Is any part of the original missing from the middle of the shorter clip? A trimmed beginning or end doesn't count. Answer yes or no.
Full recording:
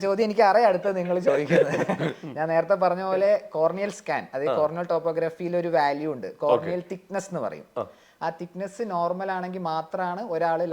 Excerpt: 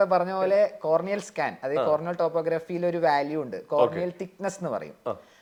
no